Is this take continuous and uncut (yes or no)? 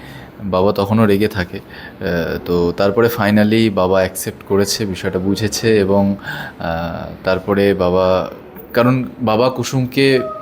yes